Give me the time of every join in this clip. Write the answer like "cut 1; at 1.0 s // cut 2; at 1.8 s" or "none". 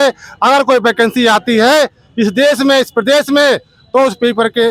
none